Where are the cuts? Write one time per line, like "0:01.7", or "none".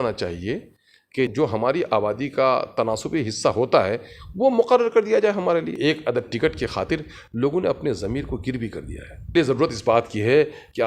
0:01.3
0:05.7
0:09.3